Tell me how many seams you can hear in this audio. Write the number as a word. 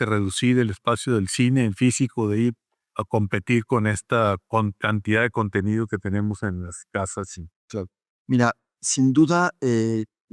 zero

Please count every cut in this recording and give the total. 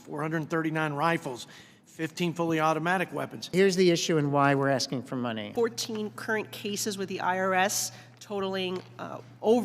two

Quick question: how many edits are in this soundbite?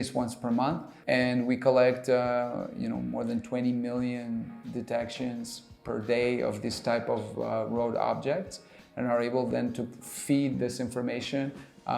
one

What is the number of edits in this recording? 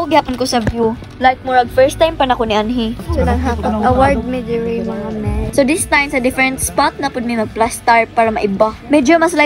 one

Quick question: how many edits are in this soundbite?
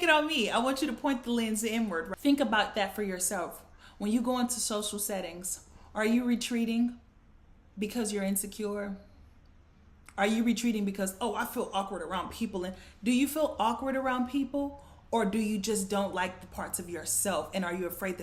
one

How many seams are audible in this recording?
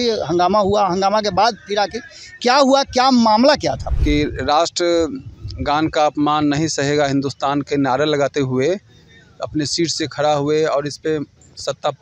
one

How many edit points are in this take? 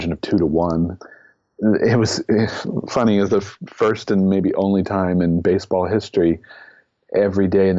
one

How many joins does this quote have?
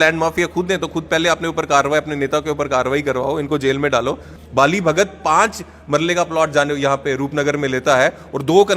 one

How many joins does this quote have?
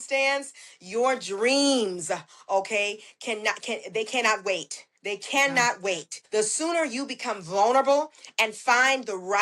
one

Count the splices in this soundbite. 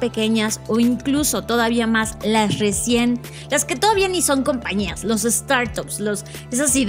zero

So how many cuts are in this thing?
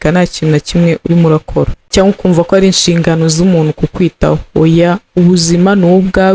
one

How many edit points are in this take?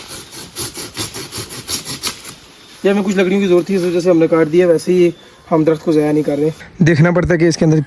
one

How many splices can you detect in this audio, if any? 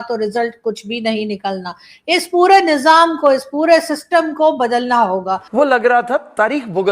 one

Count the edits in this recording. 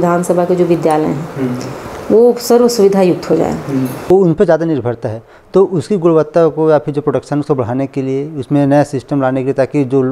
one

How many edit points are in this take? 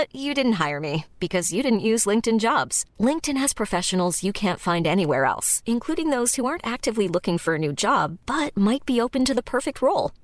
zero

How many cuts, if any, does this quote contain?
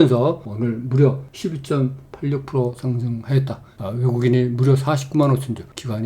two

